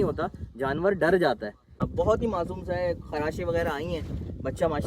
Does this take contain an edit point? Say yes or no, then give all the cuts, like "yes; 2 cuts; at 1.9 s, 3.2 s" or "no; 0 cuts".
yes; 1 cut; at 1.8 s